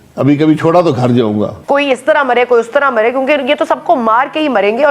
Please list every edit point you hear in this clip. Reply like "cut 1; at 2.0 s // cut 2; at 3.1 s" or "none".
cut 1; at 1.6 s